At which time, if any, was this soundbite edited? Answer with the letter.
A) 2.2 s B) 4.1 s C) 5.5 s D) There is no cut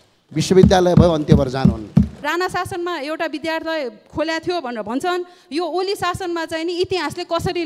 A